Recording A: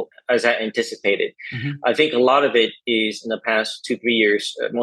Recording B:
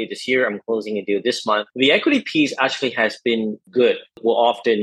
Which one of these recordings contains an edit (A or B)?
B